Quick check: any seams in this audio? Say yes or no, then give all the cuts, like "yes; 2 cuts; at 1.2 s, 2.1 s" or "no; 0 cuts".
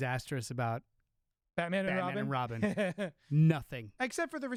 no; 0 cuts